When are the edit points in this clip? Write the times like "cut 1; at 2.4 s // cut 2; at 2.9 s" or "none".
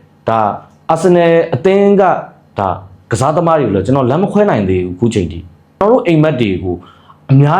cut 1; at 5.8 s